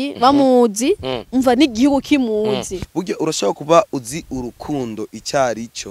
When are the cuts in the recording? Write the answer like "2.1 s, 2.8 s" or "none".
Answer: 2.8 s